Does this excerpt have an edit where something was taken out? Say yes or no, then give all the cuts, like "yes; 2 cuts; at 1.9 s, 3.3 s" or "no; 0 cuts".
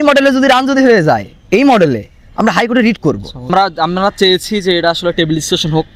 yes; 1 cut; at 3.5 s